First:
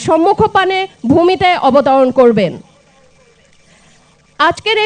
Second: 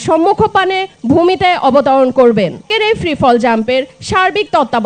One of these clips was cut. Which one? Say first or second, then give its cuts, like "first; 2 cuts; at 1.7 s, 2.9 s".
second; 1 cut; at 2.7 s